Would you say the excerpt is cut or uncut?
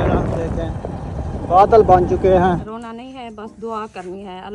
cut